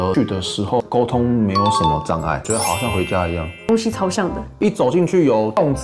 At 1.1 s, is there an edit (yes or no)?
no